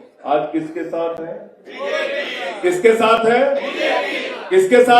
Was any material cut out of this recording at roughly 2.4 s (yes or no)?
no